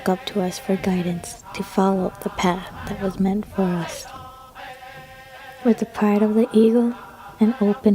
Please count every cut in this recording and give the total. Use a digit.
2